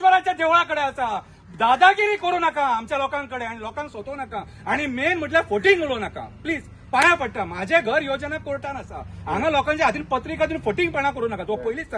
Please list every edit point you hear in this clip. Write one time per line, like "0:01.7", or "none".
none